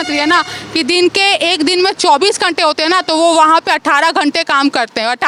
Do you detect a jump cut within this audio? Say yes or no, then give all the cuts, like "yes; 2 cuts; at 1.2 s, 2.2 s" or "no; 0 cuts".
no; 0 cuts